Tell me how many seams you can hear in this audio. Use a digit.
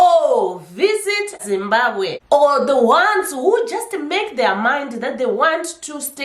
2